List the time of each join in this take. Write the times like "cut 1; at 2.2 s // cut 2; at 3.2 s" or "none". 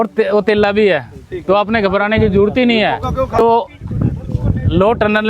cut 1; at 3.3 s